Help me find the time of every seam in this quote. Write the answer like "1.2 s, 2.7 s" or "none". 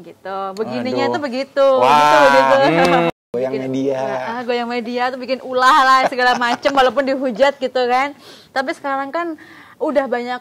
3.1 s